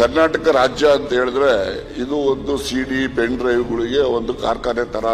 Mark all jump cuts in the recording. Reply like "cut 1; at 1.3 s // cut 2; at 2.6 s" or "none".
none